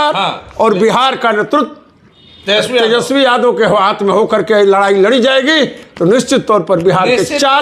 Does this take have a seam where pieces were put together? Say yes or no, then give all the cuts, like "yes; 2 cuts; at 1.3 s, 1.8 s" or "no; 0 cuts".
no; 0 cuts